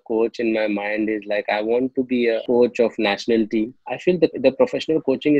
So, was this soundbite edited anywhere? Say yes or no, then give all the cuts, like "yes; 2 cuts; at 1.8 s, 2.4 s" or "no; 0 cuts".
yes; 1 cut; at 3.8 s